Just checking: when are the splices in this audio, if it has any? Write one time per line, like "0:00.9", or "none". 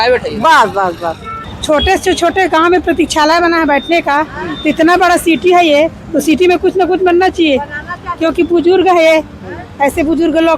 0:01.5